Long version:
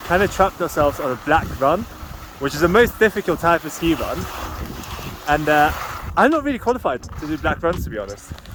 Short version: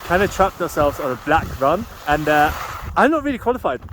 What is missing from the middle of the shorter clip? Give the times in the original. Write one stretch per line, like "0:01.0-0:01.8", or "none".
0:01.9-0:05.1